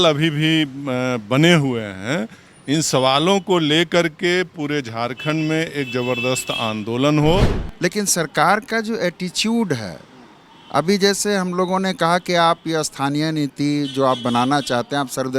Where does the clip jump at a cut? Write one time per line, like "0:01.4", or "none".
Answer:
0:07.6